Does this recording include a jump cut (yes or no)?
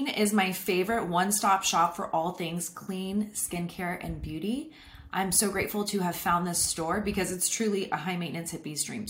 no